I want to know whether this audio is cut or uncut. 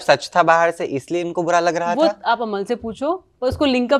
uncut